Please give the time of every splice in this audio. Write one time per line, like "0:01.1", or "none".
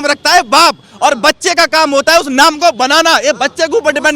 none